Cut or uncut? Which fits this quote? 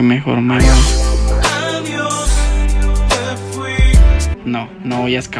cut